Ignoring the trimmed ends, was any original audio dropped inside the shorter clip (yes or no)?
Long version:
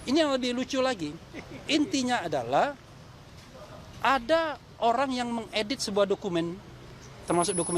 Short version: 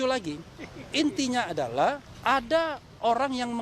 yes